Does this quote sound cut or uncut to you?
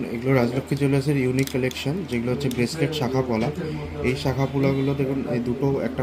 uncut